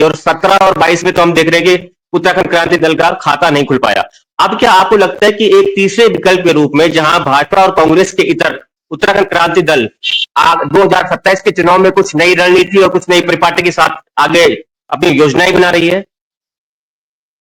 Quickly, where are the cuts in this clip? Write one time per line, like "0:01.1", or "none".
none

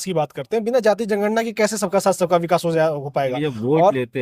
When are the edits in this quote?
none

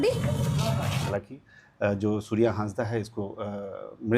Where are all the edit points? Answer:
0:01.1

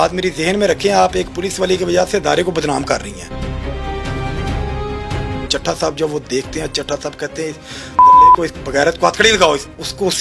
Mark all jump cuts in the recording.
0:05.5

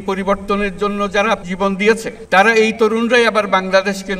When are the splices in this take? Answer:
0:01.5

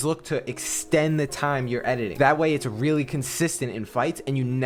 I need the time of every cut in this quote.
0:02.1

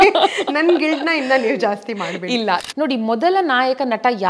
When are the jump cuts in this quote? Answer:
0:02.6

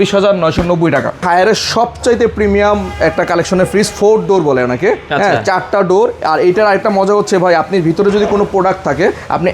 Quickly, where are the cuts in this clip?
0:01.2

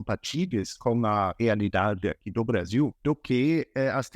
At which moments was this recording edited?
0:03.0

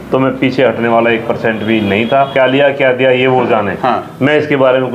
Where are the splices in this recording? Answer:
0:02.3

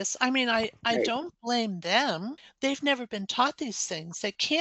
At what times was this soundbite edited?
0:02.4

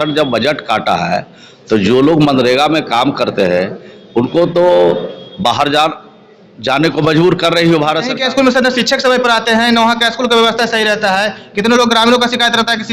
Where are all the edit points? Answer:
0:08.2

